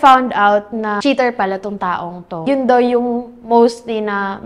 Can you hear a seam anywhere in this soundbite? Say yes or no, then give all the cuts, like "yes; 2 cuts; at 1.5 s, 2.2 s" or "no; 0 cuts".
yes; 2 cuts; at 1.0 s, 2.4 s